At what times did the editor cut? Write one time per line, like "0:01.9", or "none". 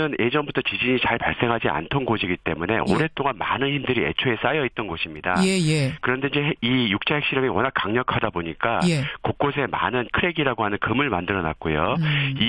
none